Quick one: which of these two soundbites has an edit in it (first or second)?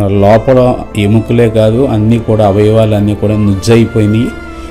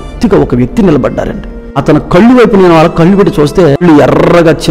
second